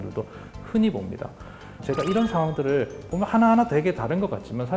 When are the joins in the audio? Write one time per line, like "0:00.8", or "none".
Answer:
0:01.8